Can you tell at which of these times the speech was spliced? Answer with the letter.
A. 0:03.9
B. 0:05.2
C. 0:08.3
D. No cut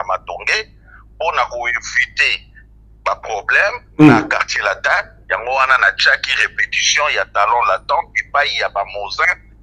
D